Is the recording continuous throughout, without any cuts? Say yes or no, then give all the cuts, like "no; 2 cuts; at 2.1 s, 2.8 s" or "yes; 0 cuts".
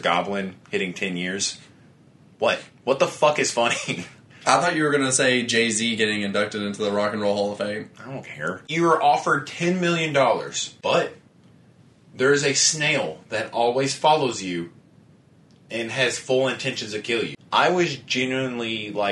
no; 3 cuts; at 8.6 s, 10.6 s, 17.3 s